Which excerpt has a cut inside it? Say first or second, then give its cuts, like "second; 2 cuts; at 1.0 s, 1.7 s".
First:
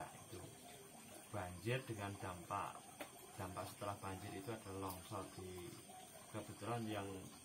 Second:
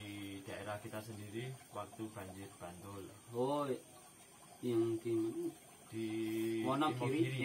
first; 1 cut; at 1.2 s